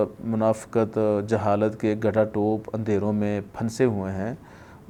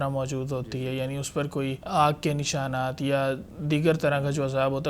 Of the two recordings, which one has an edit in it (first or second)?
second